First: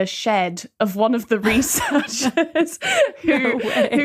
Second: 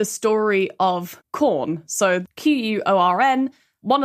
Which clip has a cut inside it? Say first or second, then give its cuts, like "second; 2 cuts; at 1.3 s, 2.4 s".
second; 2 cuts; at 1.2 s, 2.2 s